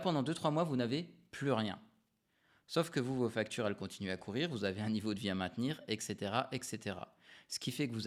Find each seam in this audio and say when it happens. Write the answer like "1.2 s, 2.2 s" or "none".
none